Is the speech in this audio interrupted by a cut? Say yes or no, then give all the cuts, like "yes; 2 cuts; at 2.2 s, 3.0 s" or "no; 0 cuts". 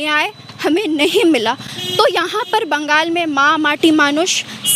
no; 0 cuts